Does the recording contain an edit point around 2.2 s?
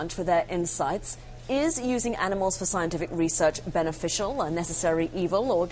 no; 1 cut; at 4.7 s

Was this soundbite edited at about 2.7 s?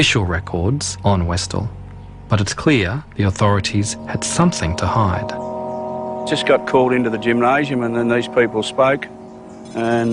yes; 1 cut; at 2.7 s

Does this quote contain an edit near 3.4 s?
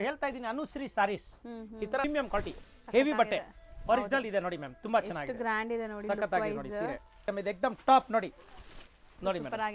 no; 2 cuts; at 2.0 s, 7.3 s

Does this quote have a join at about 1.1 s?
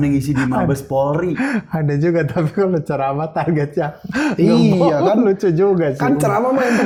no; 0 cuts

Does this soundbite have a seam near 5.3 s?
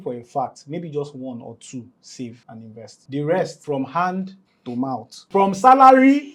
yes; 3 cuts; at 2.5 s, 3.6 s, 5.3 s

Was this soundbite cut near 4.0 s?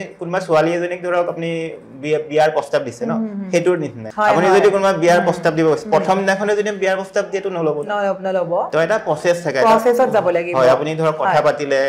yes; 1 cut; at 4.0 s

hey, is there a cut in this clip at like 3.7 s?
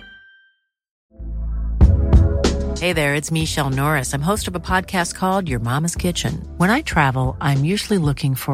no; 1 cut; at 0.9 s

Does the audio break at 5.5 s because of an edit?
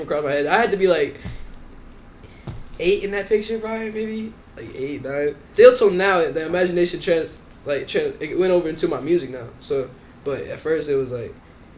yes; 1 cut; at 5.5 s

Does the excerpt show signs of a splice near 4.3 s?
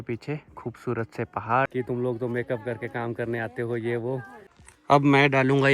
yes; 2 cuts; at 1.7 s, 4.3 s

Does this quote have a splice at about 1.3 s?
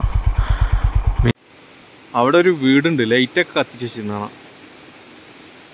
yes; 1 cut; at 1.3 s

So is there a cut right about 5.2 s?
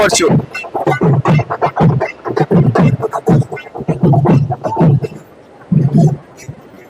yes; 1 cut; at 5.2 s

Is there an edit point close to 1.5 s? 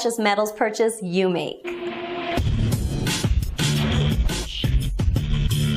no; 1 cut; at 3.1 s

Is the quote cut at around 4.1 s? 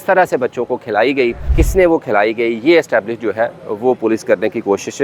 no; 1 cut; at 1.5 s

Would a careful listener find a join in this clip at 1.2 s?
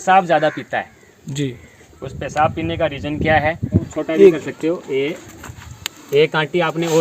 no; 1 cut; at 3.9 s

